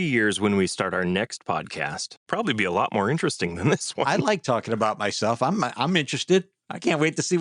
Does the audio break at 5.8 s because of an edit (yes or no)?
no